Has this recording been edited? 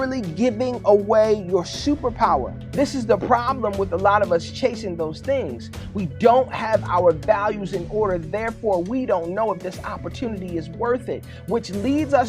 yes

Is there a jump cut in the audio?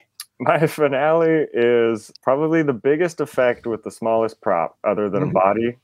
yes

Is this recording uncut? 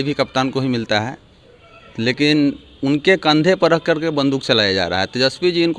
yes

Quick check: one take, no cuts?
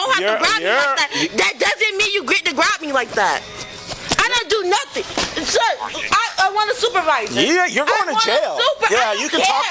yes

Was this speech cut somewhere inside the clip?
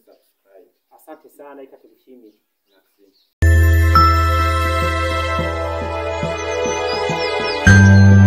yes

